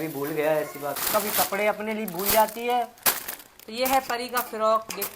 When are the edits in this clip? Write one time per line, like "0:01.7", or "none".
0:01.0

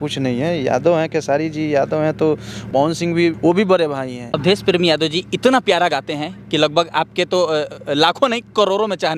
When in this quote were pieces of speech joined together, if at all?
0:02.5
0:03.4
0:04.3

